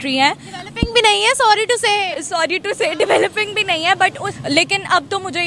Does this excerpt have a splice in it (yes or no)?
yes